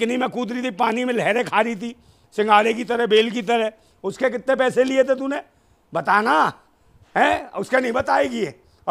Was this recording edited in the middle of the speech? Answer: no; 0 cuts

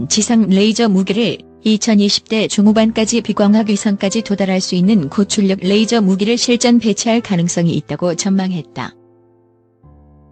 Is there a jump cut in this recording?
no; 0 cuts

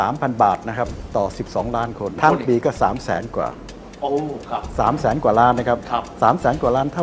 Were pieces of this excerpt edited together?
yes; 2 cuts; at 1.0 s, 2.2 s

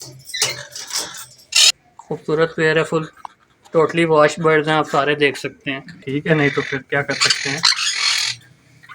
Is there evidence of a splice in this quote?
yes; 2 cuts; at 1.7 s, 5.9 s

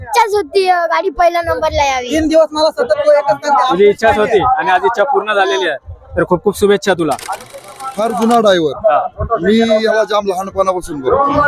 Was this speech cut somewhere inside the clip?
yes; 1 cut; at 7.7 s

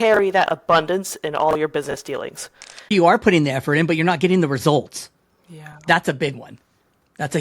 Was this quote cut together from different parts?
yes; 1 cut; at 2.9 s

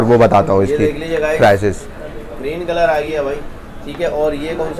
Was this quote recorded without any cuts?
yes; 0 cuts

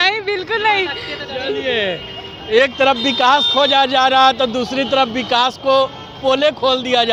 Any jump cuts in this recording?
no; 0 cuts

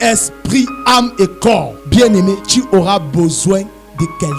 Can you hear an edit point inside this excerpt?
yes; 2 cuts; at 1.8 s, 2.4 s

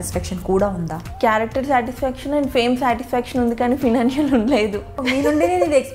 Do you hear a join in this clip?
yes; 2 cuts; at 1.0 s, 5.0 s

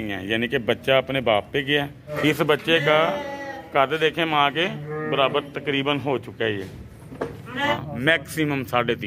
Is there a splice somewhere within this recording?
yes; 2 cuts; at 2.1 s, 7.7 s

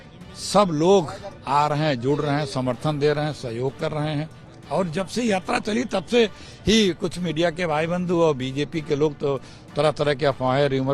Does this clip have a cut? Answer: no; 0 cuts

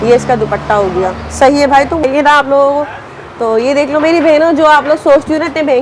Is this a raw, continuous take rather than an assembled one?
no; 1 cut; at 2.0 s

